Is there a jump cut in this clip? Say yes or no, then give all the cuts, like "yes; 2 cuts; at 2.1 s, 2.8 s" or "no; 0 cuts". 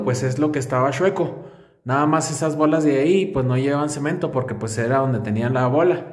no; 0 cuts